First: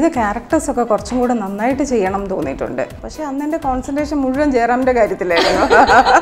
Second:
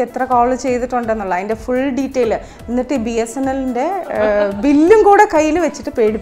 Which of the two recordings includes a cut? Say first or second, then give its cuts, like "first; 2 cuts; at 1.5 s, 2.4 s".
first; 1 cut; at 3.0 s